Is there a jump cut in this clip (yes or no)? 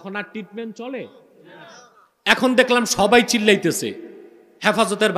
no